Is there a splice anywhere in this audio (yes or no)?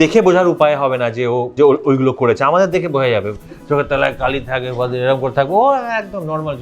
yes